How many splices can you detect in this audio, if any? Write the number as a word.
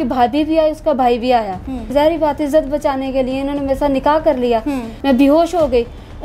two